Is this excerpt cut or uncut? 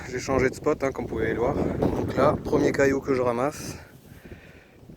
cut